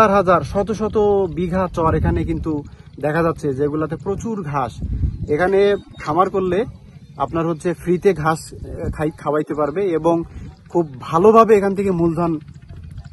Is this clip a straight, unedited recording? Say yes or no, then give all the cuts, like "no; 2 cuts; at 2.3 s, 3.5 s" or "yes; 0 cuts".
yes; 0 cuts